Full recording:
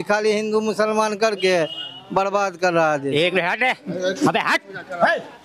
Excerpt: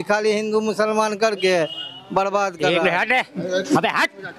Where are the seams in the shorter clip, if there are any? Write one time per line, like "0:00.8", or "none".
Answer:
0:02.7

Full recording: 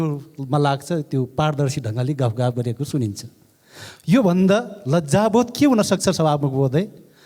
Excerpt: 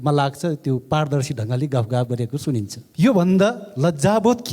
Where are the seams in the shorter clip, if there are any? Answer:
0:02.8

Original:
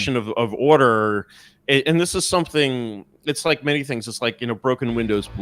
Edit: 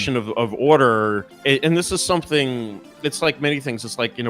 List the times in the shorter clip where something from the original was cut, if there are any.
0:01.3

